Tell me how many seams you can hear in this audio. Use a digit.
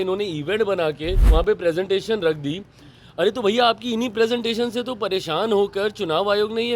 1